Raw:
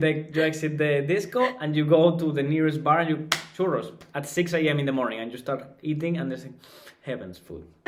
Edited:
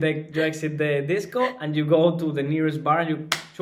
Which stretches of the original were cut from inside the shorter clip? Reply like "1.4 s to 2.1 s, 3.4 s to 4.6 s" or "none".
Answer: none